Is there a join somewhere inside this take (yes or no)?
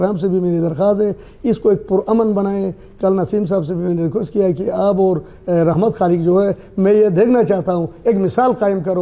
no